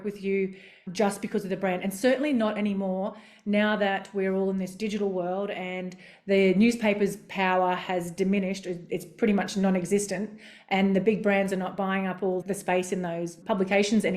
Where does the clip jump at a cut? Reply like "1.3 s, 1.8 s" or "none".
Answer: 12.4 s, 13.4 s